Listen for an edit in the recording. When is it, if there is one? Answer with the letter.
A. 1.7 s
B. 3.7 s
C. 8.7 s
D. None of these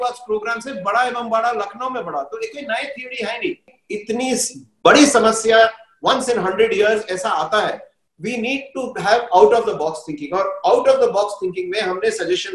B